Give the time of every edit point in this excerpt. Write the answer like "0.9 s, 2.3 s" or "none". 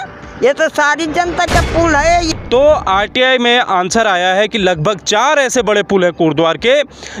2.3 s